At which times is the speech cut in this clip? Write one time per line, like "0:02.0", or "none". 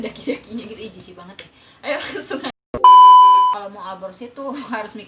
0:02.2
0:03.6